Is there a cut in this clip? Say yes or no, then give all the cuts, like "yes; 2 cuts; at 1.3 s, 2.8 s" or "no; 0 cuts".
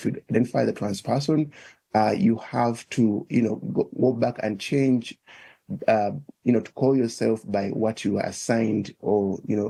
no; 0 cuts